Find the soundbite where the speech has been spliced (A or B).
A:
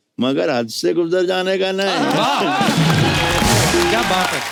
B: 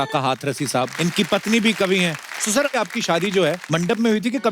B